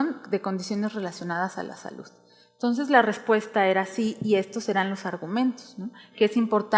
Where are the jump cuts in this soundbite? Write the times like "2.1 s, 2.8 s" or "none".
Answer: 2.8 s